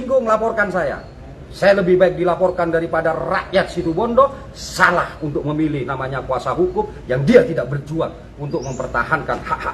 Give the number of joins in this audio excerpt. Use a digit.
0